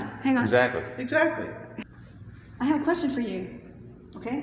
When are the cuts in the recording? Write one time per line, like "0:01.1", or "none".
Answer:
0:01.7